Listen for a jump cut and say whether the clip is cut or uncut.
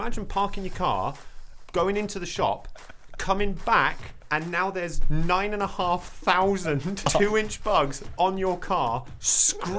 cut